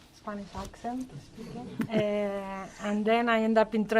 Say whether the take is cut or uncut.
cut